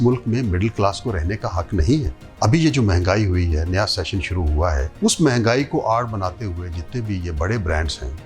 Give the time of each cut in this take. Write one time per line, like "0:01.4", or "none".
0:02.2
0:04.9